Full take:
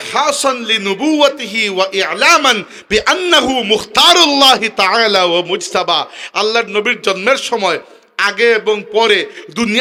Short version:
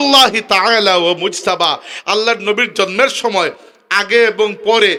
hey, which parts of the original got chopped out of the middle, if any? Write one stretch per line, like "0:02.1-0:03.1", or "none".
none

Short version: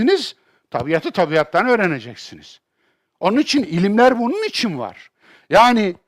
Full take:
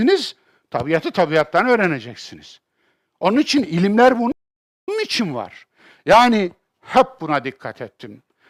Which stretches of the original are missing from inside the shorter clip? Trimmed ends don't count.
0:04.3-0:04.9

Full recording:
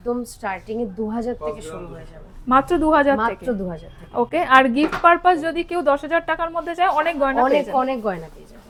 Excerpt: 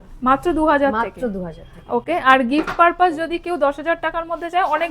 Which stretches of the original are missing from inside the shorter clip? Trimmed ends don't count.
none

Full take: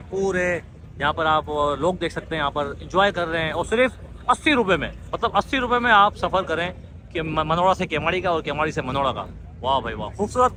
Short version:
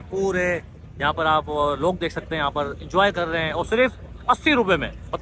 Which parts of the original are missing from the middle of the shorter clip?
none

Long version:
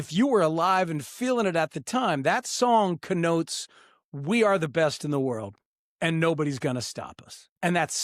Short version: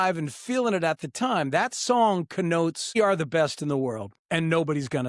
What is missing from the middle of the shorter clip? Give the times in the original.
0:03.7-0:04.4
0:05.5-0:05.8

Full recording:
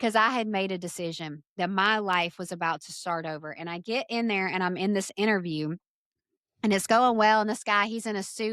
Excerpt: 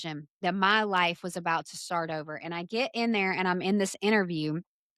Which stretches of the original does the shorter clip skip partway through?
none

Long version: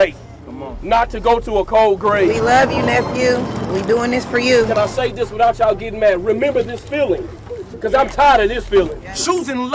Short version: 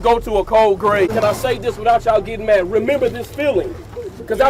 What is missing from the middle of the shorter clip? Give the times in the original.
0:02.3-0:04.6

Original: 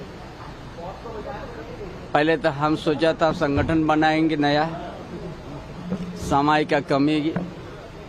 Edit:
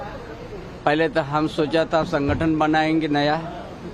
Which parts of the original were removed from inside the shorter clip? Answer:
none

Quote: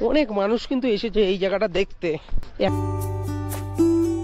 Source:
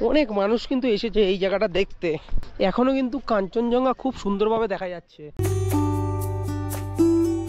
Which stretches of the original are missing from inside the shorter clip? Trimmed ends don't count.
0:02.7-0:05.9

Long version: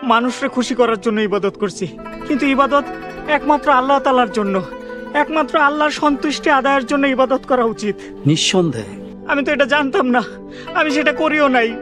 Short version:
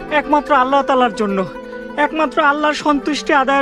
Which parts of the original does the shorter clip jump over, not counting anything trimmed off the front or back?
none

